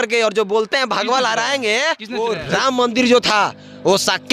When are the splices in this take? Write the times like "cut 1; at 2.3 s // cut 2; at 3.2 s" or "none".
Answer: cut 1; at 2.4 s